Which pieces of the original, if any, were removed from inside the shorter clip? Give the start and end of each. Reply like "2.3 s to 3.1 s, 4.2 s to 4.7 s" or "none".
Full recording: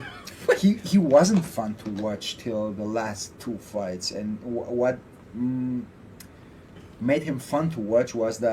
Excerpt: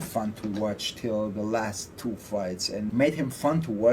4.3 s to 7.0 s